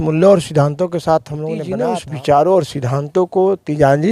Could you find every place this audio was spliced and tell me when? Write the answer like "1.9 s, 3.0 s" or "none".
1.7 s